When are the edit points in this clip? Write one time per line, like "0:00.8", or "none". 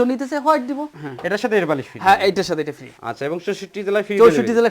0:00.9
0:02.9